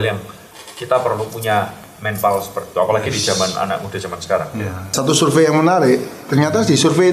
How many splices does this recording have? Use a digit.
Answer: 1